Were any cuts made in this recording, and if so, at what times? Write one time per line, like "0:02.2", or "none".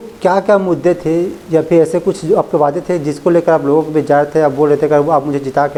none